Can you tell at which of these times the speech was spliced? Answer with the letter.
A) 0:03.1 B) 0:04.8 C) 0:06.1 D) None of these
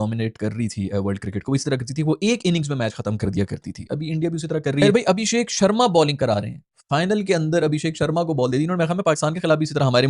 B